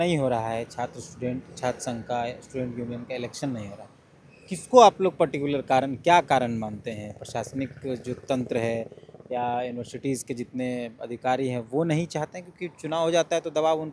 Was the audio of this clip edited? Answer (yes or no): no